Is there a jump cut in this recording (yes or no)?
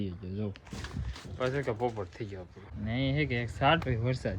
yes